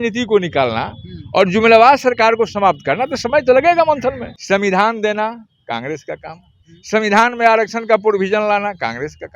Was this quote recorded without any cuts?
no; 1 cut; at 4.3 s

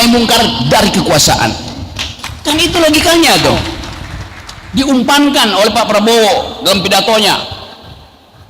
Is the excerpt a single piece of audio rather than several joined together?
no; 1 cut; at 4.6 s

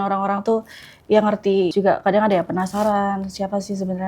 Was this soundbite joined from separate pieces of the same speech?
yes; 1 cut; at 1.7 s

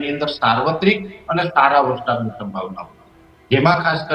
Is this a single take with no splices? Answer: yes; 0 cuts

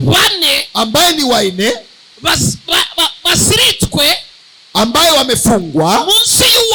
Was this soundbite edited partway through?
no; 0 cuts

